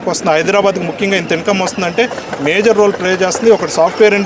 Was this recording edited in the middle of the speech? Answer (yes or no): no